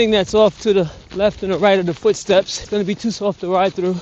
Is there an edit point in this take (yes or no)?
yes